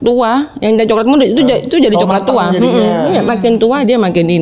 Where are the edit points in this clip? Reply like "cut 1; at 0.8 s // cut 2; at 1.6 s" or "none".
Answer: none